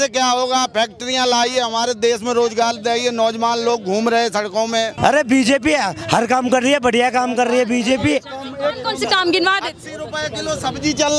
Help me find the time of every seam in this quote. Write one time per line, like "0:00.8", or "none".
0:04.9

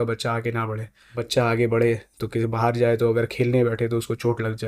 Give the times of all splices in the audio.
0:01.2

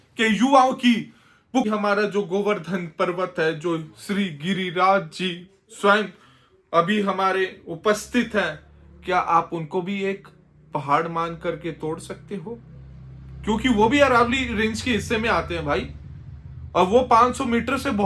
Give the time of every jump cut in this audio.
0:01.6

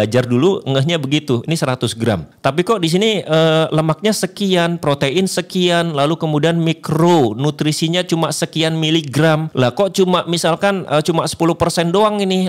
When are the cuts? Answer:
0:02.3
0:09.5

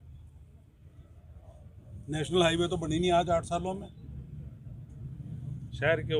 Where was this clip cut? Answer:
none

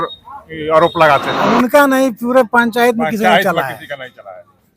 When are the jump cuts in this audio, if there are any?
0:01.5

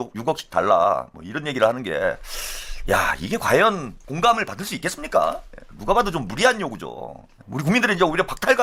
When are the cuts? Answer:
none

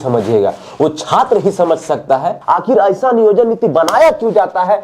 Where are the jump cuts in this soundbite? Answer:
0:02.4

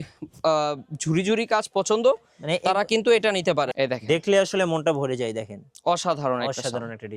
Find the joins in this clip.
0:03.7

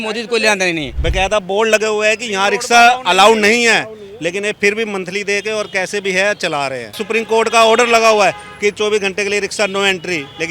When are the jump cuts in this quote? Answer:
0:00.9
0:07.0

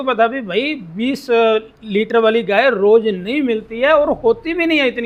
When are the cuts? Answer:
none

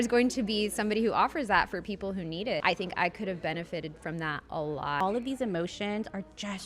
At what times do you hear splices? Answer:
0:02.6
0:05.0

